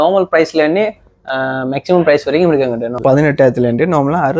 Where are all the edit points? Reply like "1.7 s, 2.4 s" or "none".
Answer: 2.9 s